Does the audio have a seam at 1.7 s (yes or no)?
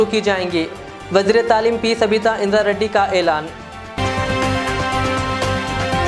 no